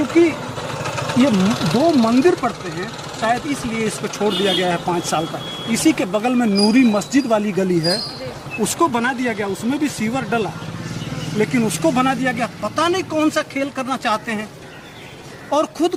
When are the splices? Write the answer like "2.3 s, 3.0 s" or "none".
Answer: none

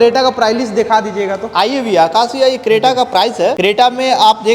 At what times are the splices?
none

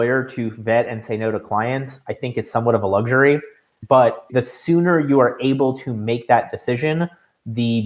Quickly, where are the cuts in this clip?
3.8 s

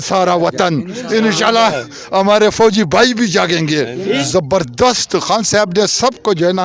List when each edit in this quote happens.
4.2 s

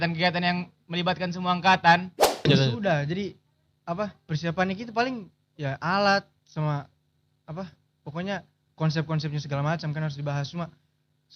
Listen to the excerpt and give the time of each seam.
2.4 s

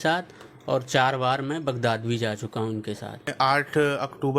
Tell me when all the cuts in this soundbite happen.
3.3 s

